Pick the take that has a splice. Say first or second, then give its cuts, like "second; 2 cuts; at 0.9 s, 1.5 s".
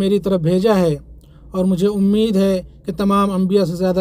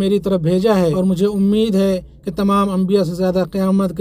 second; 1 cut; at 0.9 s